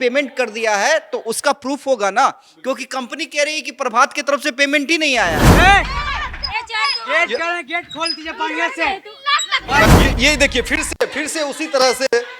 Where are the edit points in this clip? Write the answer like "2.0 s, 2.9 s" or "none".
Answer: 5.5 s